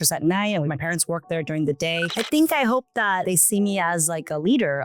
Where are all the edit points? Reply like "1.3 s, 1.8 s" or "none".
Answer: 2.1 s, 3.2 s